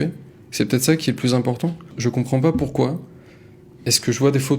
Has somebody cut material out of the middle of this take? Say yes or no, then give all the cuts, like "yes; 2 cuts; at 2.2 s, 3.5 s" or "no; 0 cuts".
yes; 1 cut; at 1.9 s